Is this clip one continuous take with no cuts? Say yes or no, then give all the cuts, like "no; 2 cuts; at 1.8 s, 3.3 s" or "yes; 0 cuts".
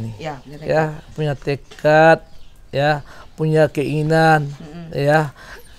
yes; 0 cuts